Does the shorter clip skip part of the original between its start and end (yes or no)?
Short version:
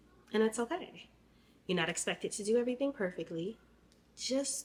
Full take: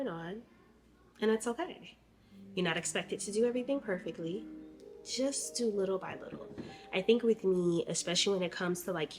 no